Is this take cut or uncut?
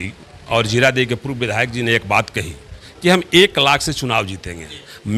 uncut